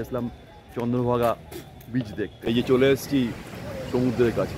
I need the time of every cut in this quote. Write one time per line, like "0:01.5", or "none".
0:02.5

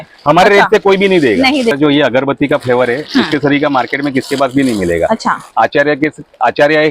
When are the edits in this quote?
0:01.7

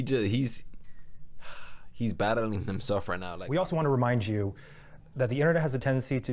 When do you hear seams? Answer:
0:03.3

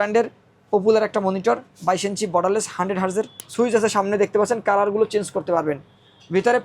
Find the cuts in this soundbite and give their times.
0:03.4

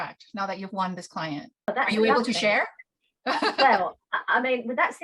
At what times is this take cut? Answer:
0:01.7

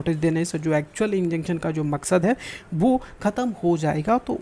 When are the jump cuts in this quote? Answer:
none

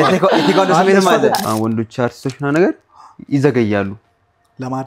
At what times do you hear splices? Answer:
0:01.4

